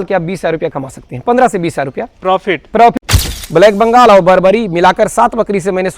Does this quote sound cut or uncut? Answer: cut